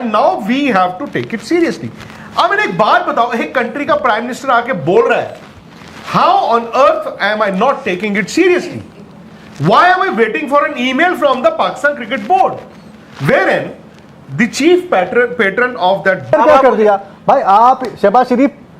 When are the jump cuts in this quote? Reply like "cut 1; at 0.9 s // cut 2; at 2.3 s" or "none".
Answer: cut 1; at 16.3 s

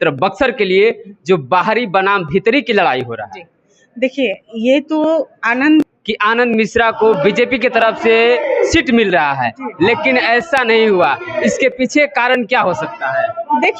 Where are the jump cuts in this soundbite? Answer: cut 1; at 5.8 s

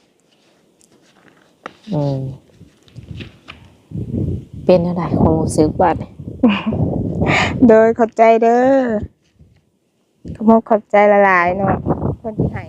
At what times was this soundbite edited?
cut 1; at 11.8 s

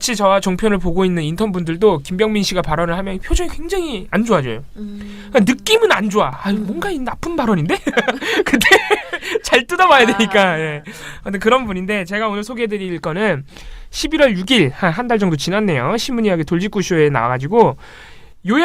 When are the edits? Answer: none

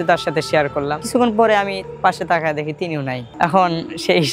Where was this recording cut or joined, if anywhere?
cut 1; at 1.0 s

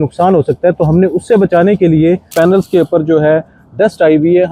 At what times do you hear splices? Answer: cut 1; at 2.3 s

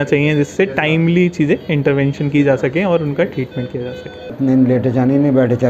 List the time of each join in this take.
cut 1; at 4.3 s

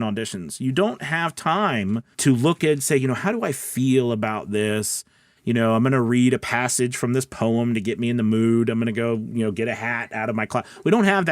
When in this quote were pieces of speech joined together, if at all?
cut 1; at 2.1 s

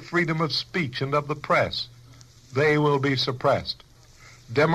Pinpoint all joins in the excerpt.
none

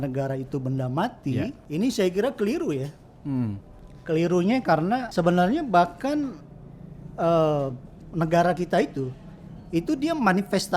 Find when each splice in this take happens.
cut 1; at 1.6 s // cut 2; at 5.1 s

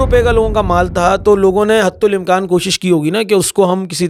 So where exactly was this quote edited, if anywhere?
none

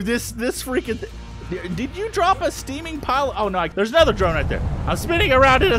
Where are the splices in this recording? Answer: cut 1; at 3.7 s

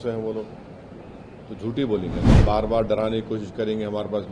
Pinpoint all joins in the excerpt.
cut 1; at 2.3 s

